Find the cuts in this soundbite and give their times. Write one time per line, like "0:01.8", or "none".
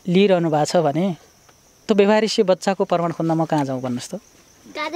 none